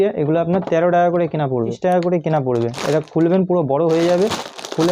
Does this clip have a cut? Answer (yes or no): yes